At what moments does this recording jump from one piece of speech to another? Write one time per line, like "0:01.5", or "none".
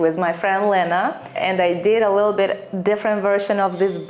0:01.4